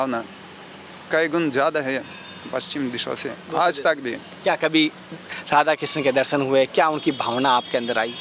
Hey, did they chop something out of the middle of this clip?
yes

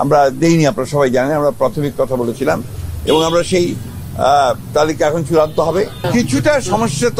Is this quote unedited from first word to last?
no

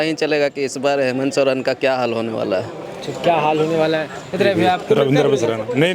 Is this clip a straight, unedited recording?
yes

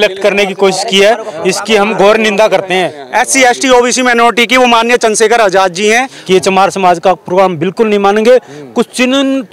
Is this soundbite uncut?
no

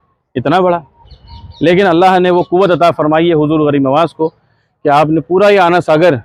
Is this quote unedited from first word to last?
yes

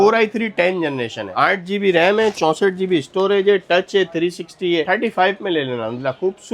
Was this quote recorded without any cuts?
yes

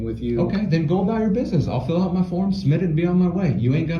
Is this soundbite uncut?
yes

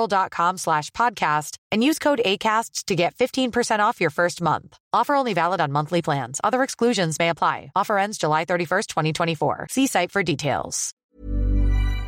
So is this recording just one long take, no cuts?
no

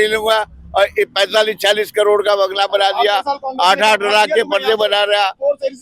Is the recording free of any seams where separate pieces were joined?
yes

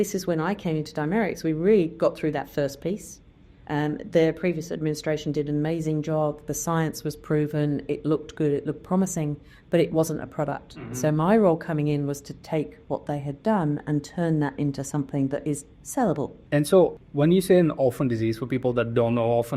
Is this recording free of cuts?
no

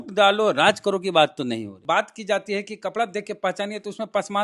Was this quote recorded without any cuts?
no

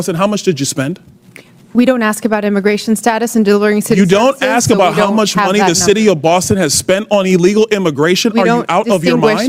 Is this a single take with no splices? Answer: yes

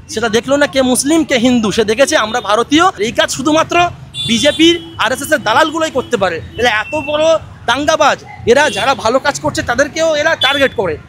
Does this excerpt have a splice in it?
yes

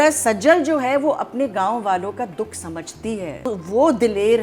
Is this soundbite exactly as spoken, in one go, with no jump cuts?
no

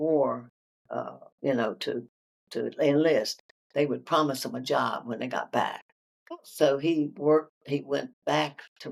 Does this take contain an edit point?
no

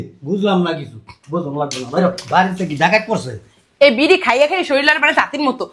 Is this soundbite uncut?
yes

